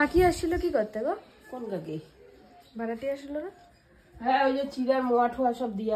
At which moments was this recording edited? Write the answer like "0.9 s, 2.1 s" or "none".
none